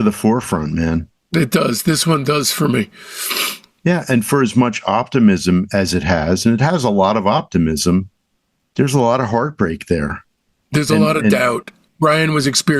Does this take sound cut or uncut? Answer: cut